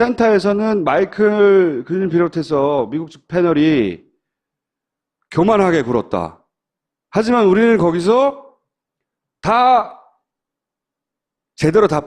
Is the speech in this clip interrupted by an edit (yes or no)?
yes